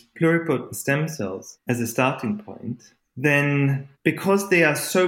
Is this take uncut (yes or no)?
no